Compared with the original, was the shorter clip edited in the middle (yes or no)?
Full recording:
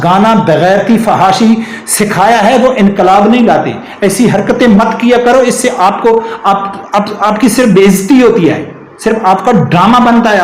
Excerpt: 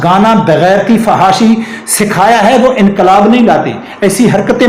no